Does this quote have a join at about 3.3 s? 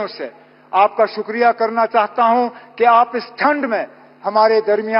no; 0 cuts

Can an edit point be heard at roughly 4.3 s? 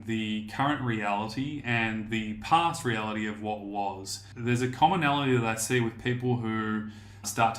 yes; 1 cut; at 4.3 s

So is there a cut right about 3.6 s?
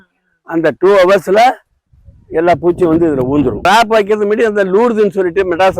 yes; 1 cut; at 3.6 s

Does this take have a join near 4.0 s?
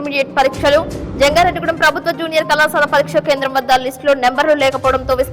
no; 0 cuts

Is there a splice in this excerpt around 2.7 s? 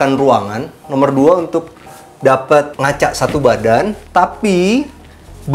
yes; 2 cuts; at 2.7 s, 4.0 s

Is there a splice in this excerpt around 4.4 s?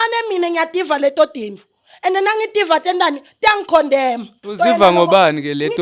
yes; 1 cut; at 4.4 s

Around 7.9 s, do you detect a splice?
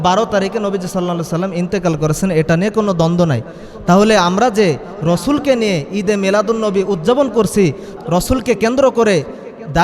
yes; 1 cut; at 7.9 s

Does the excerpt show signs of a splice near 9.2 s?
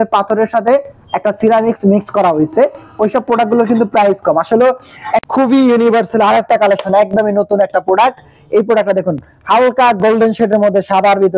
no; 1 cut; at 5.2 s

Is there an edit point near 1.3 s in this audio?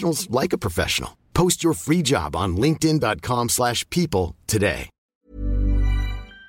no; 1 cut; at 5.0 s

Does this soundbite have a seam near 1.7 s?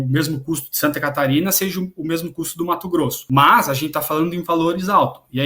no; 1 cut; at 3.2 s

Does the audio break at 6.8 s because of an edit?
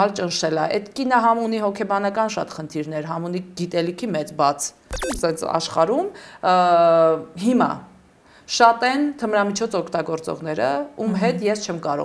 no; 1 cut; at 5.1 s

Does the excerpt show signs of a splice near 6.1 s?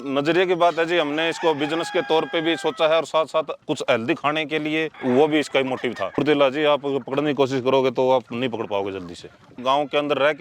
yes; 2 cuts; at 6.1 s, 9.5 s

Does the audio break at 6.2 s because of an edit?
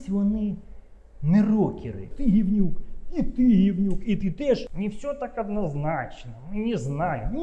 no; 2 cuts; at 2.1 s, 4.7 s

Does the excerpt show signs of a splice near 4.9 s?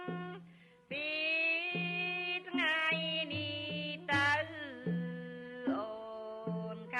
yes; 1 cut; at 4.9 s

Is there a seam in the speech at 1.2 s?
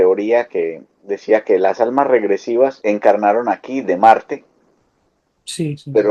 no; 1 cut; at 2.8 s

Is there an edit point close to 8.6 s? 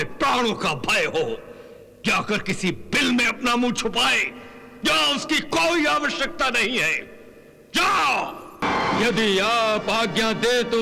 yes; 1 cut; at 8.6 s

